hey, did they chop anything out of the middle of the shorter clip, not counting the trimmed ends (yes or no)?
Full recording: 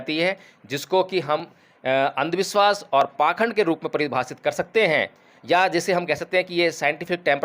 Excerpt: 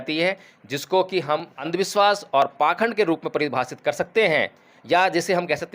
yes